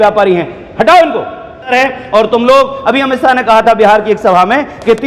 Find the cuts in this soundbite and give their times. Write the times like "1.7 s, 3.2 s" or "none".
1.7 s